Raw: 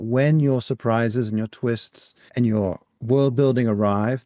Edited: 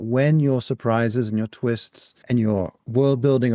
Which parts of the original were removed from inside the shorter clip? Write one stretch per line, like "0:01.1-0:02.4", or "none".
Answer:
0:02.4-0:02.5